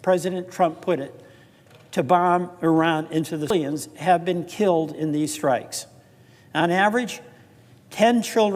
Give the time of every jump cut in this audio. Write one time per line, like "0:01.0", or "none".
0:03.5